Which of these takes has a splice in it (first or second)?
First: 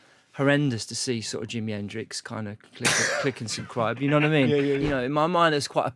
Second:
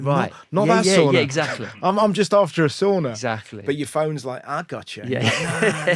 first